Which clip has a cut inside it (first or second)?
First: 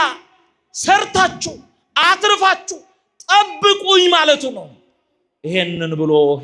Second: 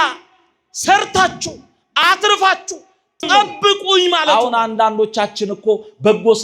second